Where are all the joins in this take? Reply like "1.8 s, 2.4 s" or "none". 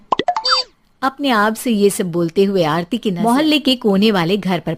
3.2 s